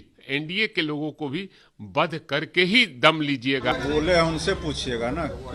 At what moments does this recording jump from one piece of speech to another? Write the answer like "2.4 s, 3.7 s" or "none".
3.7 s